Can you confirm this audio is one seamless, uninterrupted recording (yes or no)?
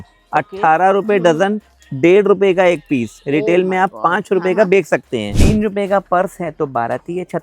no